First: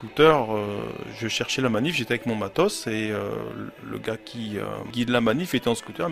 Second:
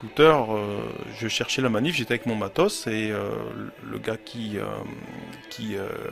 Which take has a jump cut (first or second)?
first